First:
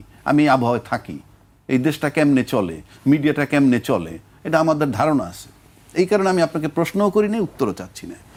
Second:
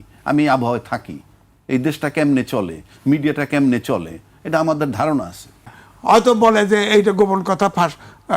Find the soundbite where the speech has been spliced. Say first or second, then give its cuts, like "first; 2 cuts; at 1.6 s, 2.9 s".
second; 1 cut; at 5.8 s